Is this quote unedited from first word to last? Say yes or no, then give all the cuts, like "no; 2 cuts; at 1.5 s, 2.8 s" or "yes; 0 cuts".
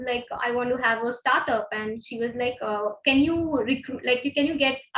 yes; 0 cuts